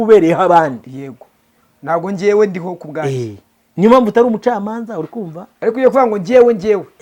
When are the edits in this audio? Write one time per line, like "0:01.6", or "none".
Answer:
none